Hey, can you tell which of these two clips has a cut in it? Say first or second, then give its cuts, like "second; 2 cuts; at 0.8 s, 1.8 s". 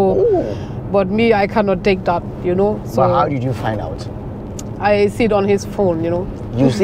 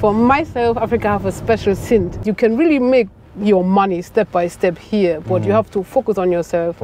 second; 1 cut; at 2.2 s